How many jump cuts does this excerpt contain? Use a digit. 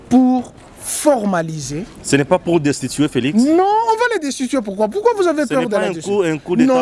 0